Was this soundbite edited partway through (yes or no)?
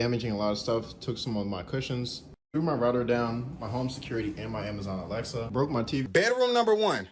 yes